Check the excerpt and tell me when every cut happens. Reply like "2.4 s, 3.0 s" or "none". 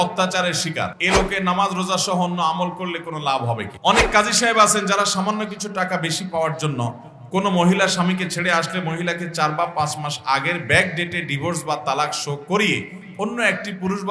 1.0 s, 3.7 s